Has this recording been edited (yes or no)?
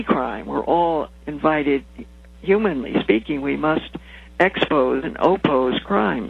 yes